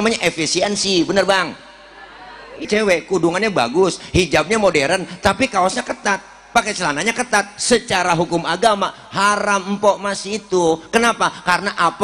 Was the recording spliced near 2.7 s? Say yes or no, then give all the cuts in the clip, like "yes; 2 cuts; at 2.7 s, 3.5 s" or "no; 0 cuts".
yes; 1 cut; at 2.7 s